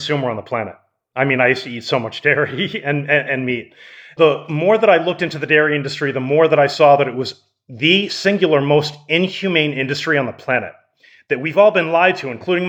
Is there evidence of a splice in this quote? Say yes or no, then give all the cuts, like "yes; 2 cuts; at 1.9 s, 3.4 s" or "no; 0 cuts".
no; 0 cuts